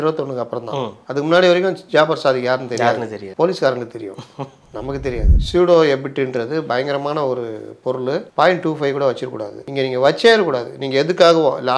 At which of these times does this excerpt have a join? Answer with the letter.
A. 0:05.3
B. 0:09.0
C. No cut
A